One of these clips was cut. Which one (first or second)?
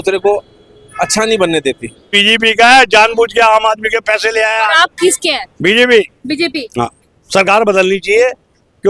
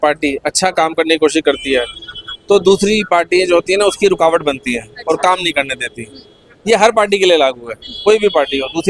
first